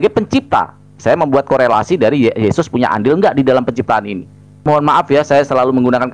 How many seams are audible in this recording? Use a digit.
1